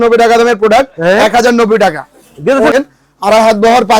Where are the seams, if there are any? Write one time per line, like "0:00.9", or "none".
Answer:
0:02.7